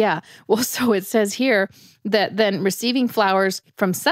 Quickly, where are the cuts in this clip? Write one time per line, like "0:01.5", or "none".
none

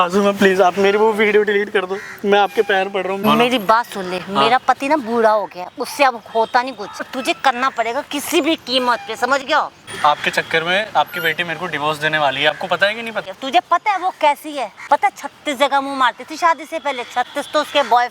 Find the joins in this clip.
0:03.2
0:07.1
0:09.8
0:13.3
0:14.7

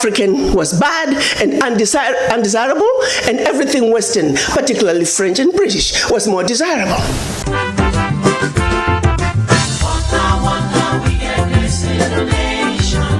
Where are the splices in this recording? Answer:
none

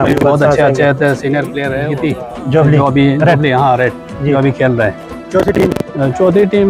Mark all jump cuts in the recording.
0:01.9

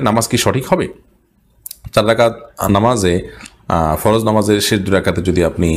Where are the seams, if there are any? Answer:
none

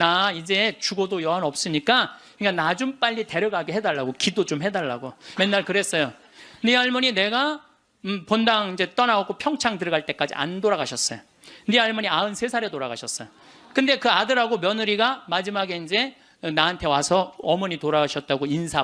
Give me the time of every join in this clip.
0:02.2
0:05.2

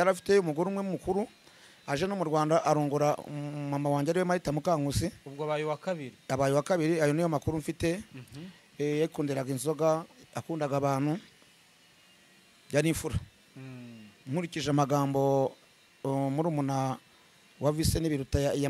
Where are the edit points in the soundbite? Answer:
none

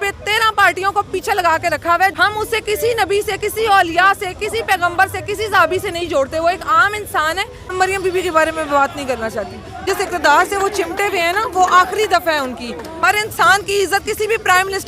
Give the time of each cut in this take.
0:02.1
0:07.6
0:09.8
0:13.0

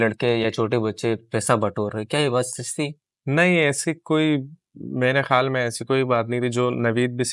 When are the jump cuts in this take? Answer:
none

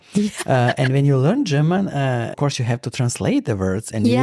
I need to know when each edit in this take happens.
0:02.2

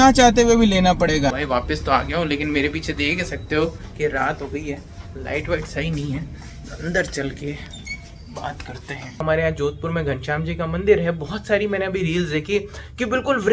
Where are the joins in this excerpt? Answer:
0:01.3
0:09.2

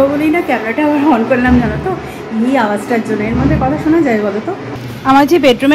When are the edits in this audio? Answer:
none

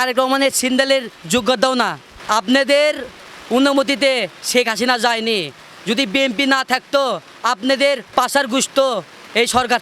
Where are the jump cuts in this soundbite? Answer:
0:02.2
0:08.1

